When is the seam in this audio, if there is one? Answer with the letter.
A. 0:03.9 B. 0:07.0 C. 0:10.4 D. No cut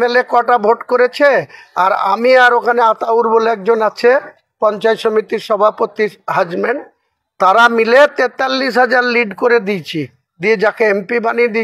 D